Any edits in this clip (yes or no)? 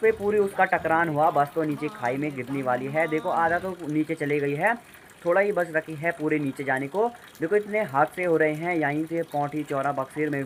no